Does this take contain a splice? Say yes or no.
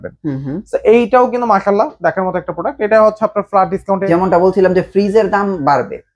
yes